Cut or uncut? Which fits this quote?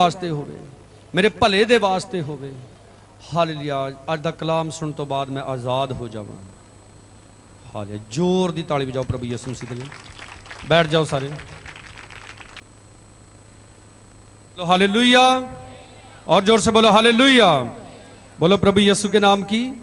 cut